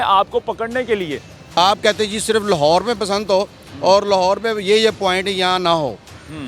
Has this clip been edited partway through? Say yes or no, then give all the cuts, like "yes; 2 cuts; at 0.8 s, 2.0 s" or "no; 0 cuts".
yes; 1 cut; at 1.4 s